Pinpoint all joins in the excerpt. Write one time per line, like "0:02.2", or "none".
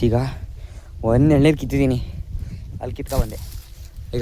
0:01.9